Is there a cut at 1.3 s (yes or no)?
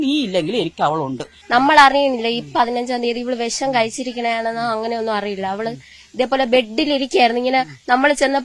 yes